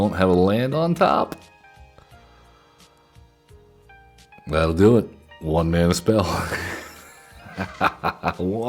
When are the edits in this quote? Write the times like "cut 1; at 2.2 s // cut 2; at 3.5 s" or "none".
none